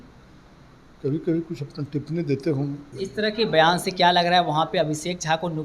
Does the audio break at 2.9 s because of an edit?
yes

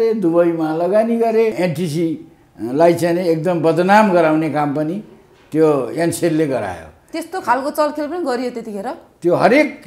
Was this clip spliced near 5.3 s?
no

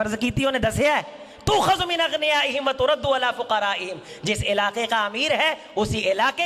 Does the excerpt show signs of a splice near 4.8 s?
no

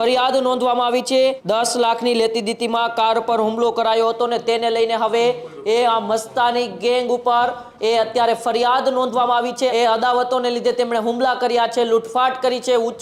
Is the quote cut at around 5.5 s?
no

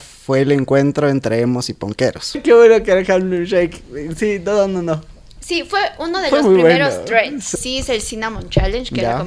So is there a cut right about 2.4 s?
yes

